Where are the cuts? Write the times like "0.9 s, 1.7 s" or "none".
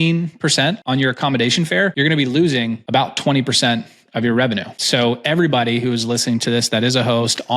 0.8 s, 1.9 s, 2.8 s, 4.7 s